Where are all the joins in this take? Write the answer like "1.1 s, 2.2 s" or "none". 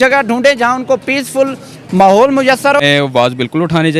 2.8 s

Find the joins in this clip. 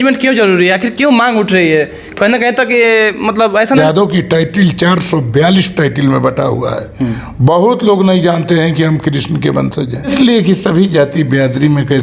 3.8 s, 10.1 s

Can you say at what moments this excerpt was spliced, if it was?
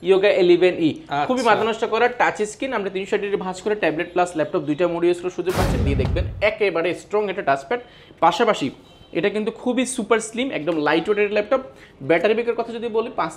5.9 s

